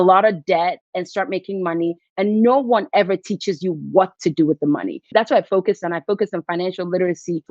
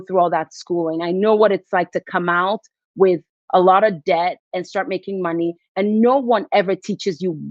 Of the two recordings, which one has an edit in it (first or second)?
first